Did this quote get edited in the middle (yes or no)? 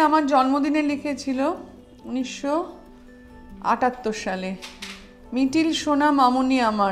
no